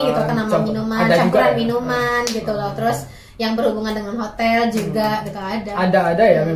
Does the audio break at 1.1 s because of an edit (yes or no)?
no